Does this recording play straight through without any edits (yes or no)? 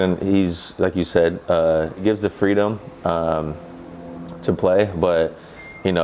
no